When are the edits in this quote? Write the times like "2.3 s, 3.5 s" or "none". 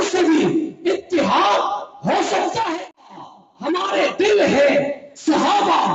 3.3 s